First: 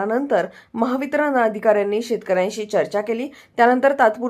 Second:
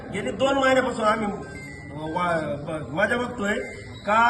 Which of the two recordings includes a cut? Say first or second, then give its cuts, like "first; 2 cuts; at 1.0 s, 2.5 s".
first; 1 cut; at 2.0 s